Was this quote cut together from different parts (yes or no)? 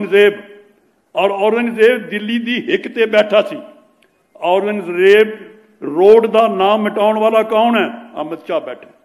no